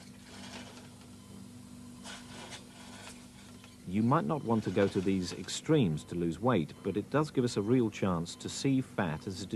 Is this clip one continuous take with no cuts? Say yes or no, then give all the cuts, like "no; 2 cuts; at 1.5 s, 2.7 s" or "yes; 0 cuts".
yes; 0 cuts